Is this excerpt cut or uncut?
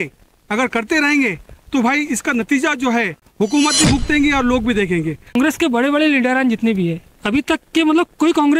cut